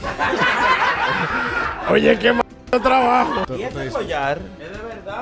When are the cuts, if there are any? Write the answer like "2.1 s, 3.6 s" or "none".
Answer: 3.5 s